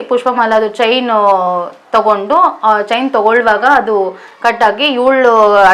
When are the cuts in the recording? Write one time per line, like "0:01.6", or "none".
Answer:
none

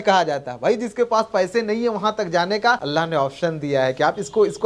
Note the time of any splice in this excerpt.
0:02.8

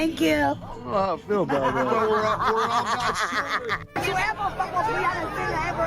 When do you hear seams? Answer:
0:03.8

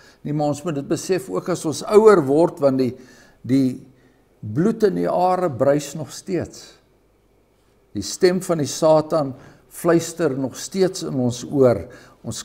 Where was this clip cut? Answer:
none

